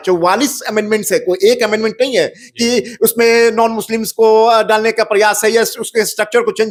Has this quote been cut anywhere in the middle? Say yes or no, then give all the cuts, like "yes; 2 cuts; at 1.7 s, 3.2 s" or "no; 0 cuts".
no; 0 cuts